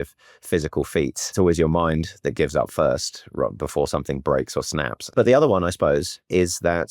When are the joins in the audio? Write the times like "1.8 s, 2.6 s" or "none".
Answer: 1.3 s, 5.1 s